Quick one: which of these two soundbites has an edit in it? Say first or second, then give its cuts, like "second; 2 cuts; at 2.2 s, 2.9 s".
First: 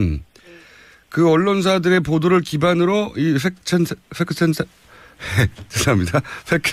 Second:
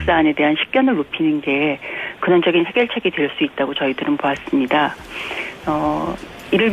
second; 1 cut; at 3.1 s